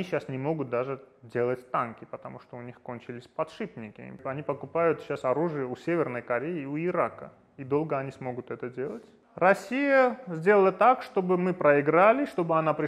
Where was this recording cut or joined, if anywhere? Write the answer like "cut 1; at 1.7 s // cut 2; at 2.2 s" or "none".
cut 1; at 4.2 s // cut 2; at 9.2 s